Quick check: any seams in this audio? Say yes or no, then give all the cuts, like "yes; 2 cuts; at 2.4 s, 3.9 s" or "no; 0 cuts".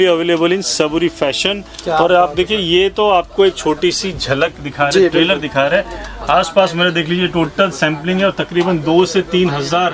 no; 0 cuts